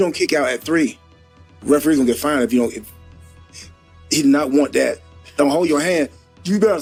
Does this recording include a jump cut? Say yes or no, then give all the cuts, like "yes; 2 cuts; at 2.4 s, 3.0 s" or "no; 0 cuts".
no; 0 cuts